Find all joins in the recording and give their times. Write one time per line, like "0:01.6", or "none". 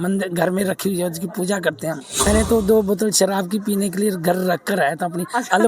0:02.1